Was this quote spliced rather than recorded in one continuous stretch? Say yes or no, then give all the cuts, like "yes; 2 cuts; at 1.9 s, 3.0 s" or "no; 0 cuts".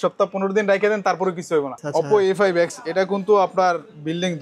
yes; 1 cut; at 1.7 s